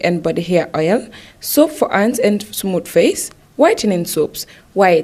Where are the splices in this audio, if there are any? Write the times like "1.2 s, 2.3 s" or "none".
none